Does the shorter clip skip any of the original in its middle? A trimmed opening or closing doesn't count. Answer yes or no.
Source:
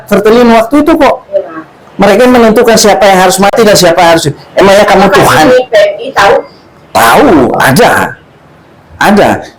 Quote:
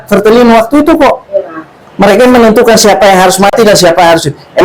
no